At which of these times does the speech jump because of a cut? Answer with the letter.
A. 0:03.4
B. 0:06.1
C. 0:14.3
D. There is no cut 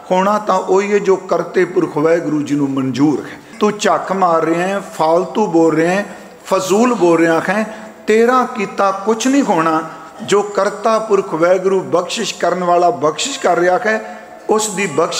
A